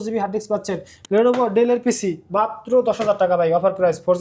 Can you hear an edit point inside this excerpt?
yes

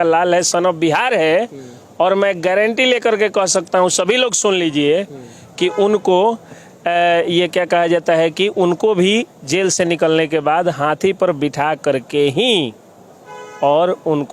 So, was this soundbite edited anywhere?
no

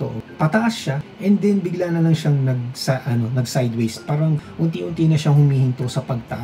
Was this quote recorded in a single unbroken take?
yes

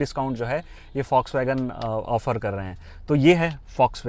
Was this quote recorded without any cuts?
yes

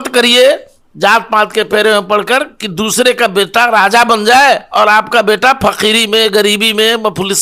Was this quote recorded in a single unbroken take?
yes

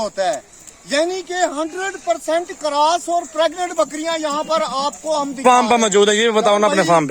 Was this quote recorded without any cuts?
no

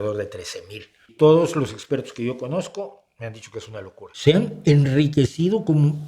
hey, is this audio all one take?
no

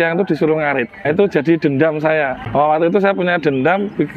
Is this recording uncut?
no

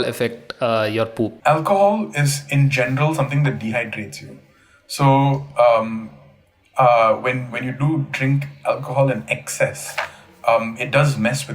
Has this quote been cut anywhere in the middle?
yes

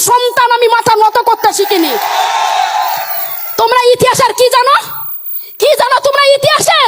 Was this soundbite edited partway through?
no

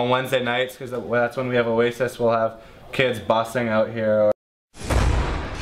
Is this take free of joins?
no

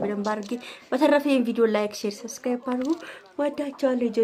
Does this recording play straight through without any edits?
yes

